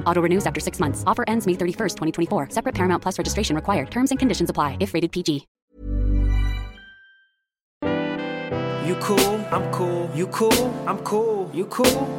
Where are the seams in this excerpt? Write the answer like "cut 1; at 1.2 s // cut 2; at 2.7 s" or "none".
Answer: cut 1; at 5.5 s // cut 2; at 7.8 s